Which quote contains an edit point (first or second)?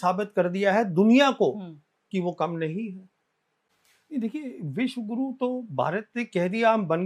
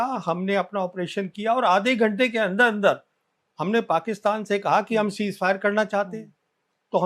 first